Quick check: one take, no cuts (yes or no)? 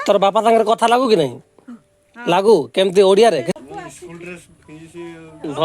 no